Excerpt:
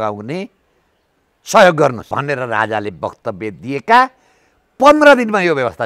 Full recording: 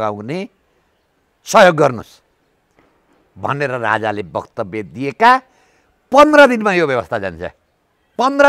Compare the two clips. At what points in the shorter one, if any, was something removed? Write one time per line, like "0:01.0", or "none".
0:02.0